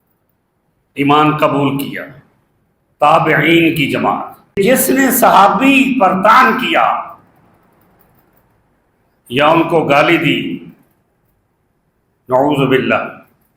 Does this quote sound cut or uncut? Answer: cut